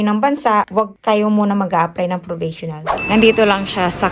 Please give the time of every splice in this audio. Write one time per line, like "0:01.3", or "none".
0:02.9